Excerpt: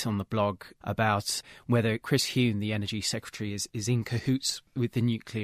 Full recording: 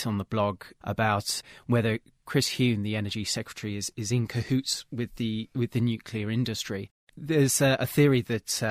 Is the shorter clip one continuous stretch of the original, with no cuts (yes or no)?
no